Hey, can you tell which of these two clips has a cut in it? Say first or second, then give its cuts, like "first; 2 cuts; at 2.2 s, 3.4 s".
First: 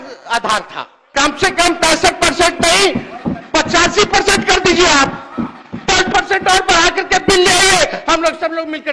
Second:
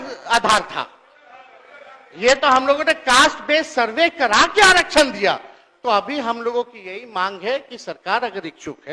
first; 1 cut; at 1.0 s